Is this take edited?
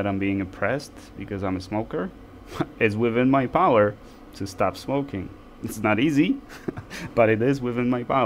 no; 0 cuts

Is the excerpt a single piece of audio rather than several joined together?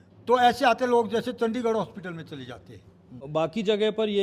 no; 1 cut; at 3.2 s

